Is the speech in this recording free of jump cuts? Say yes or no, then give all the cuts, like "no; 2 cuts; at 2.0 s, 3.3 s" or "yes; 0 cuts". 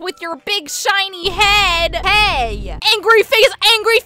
no; 1 cut; at 2.0 s